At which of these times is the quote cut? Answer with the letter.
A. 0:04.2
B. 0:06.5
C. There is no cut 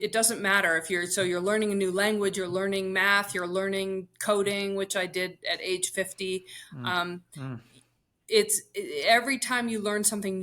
C